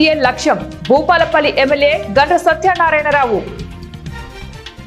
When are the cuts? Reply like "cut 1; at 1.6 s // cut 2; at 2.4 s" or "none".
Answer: none